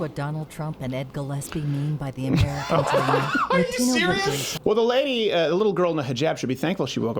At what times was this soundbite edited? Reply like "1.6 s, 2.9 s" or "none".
4.5 s